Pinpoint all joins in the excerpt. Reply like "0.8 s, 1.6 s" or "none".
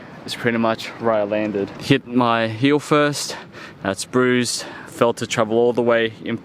1.7 s